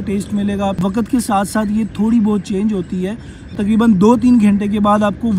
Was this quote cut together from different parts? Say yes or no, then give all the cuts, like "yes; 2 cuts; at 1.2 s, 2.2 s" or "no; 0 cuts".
yes; 2 cuts; at 0.8 s, 3.5 s